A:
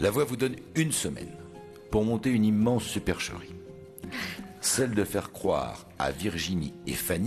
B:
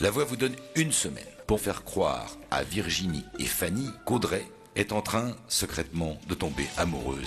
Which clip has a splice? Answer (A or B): B